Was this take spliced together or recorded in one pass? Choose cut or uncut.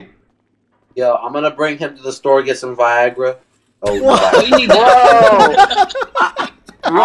cut